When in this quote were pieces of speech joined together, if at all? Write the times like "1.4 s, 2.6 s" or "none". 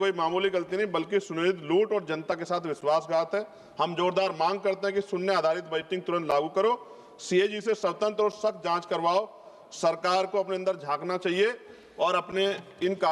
none